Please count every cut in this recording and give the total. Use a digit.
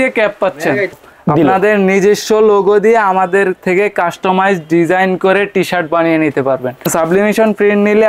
2